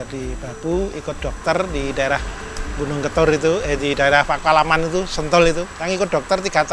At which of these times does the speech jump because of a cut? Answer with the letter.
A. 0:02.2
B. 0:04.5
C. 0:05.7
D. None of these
C